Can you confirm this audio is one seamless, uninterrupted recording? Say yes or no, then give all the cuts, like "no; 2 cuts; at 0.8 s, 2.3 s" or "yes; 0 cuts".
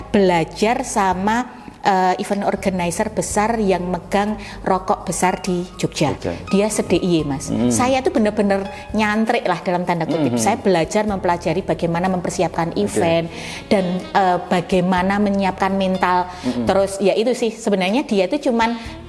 yes; 0 cuts